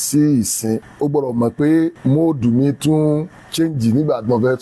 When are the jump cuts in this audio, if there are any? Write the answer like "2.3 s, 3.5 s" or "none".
0.9 s, 2.0 s, 3.4 s